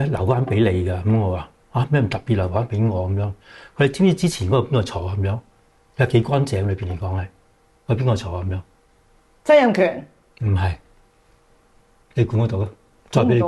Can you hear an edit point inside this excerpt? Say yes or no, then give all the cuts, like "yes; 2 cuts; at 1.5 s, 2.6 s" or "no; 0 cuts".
no; 0 cuts